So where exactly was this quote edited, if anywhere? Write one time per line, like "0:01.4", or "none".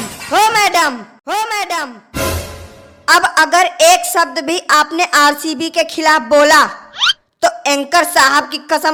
none